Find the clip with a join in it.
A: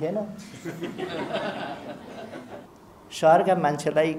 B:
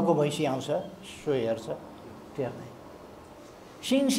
A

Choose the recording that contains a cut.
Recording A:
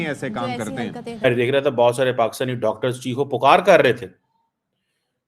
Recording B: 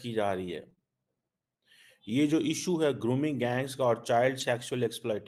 A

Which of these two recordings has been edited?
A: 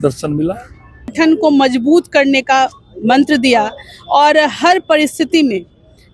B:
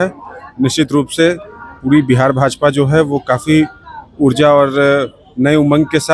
A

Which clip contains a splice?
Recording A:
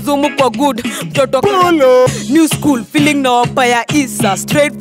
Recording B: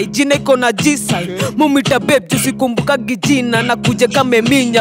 A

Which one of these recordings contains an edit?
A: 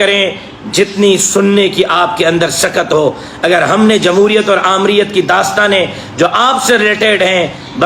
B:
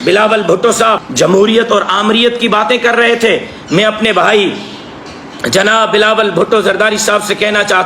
B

